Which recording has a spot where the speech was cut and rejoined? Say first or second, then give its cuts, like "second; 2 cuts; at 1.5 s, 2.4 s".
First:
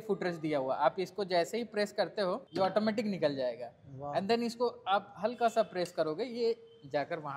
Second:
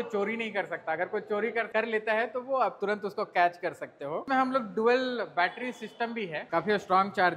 second; 2 cuts; at 4.2 s, 6.5 s